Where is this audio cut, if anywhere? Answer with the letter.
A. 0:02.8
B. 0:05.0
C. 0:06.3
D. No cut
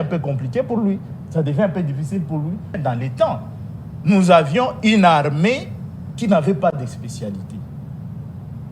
A